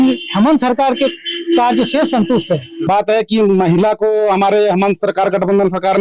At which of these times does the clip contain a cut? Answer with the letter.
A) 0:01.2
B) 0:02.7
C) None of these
B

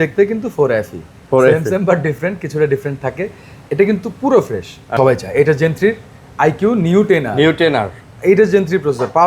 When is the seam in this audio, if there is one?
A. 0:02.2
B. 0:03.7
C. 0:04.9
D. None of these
C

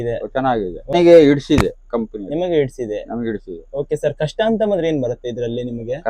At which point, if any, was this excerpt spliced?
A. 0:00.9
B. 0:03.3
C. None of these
A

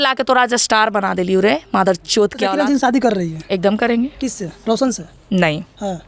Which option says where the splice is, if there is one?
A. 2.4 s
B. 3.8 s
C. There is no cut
A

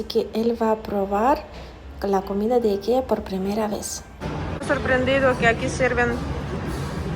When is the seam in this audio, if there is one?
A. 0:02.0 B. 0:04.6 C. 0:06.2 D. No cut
B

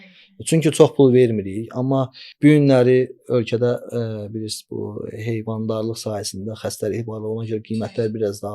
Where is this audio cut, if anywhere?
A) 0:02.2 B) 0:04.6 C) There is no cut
A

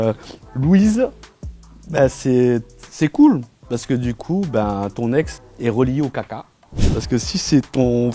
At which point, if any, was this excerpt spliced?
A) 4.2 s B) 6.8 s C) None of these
B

